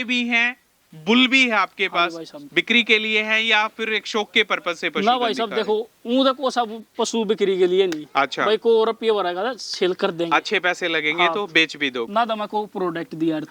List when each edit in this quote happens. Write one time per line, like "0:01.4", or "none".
0:12.1